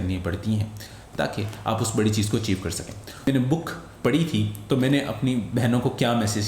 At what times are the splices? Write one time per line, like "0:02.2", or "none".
0:03.3